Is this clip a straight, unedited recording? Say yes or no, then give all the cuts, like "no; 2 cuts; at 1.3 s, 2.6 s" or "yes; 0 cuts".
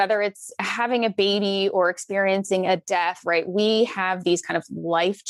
yes; 0 cuts